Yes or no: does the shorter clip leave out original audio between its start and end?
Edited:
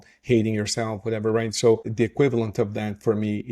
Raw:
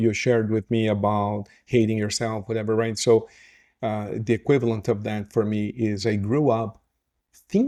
yes